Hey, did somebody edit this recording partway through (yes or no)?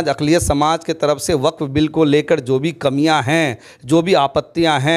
no